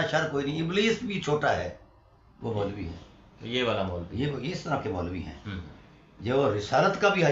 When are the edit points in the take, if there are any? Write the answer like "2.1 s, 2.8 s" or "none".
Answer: none